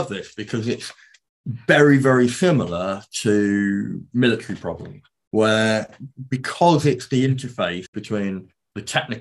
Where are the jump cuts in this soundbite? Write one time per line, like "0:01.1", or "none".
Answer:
0:07.9